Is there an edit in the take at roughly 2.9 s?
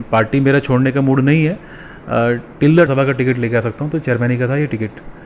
yes; 1 cut; at 2.9 s

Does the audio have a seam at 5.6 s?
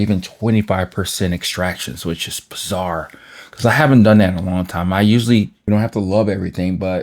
yes; 1 cut; at 5.6 s

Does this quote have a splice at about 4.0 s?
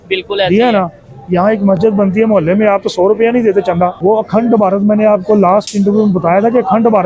yes; 1 cut; at 4.0 s

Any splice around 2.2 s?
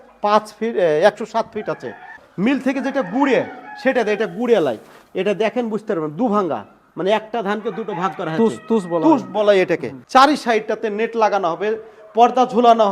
yes; 2 cuts; at 2.2 s, 9.9 s

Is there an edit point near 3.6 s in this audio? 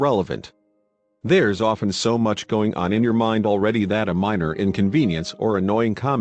yes; 1 cut; at 3.6 s

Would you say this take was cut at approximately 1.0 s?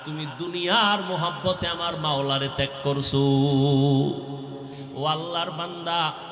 no; 1 cut; at 4.8 s

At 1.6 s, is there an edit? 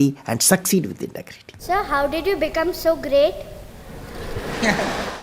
yes; 1 cut; at 1.6 s

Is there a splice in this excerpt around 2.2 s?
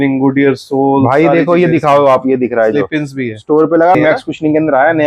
no; 1 cut; at 3.9 s

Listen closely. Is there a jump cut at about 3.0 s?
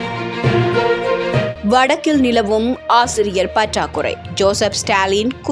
no; 1 cut; at 1.5 s

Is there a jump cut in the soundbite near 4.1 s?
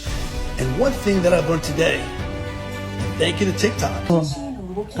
yes; 1 cut; at 4.1 s

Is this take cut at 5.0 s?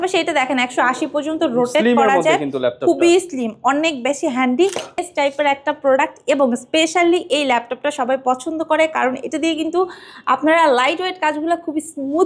yes; 1 cut; at 5.0 s

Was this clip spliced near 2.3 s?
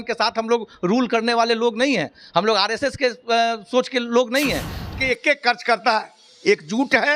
no; 1 cut; at 4.9 s

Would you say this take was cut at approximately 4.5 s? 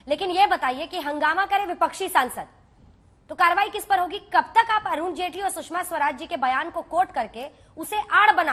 no; 0 cuts

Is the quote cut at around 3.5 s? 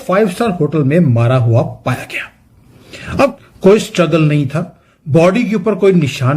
yes; 1 cut; at 3.5 s

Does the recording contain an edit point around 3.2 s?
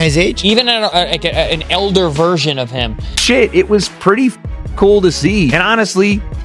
yes; 1 cut; at 3.2 s

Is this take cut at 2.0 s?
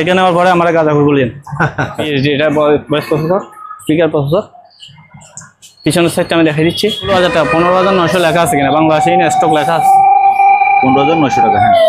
yes; 2 cuts; at 2.0 s, 7.1 s

